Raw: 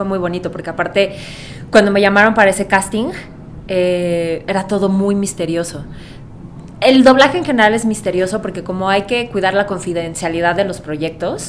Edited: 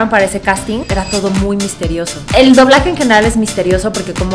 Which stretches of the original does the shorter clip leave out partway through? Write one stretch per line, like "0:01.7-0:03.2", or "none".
0:03.1-0:04.4
0:05.8-0:06.7